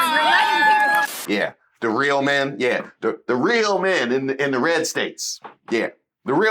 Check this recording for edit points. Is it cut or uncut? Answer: cut